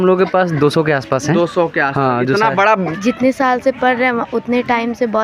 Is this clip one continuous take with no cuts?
no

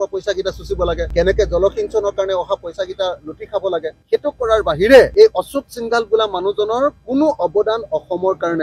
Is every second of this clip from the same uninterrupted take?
yes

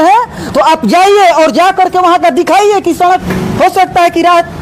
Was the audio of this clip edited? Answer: yes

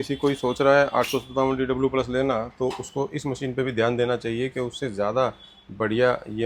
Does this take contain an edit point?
no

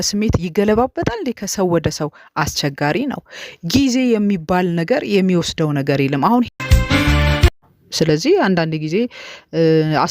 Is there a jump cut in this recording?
yes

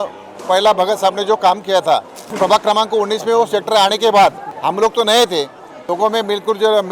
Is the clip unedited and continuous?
no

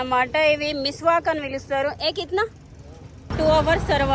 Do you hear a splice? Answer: yes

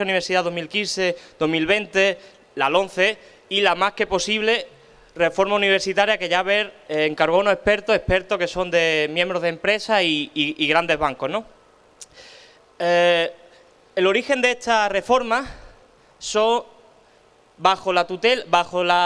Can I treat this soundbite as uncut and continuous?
no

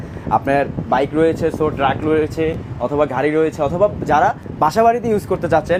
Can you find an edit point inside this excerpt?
no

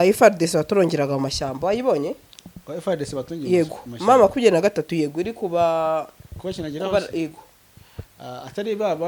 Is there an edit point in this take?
no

